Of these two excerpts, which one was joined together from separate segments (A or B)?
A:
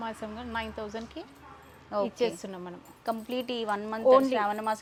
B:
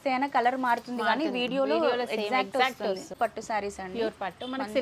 B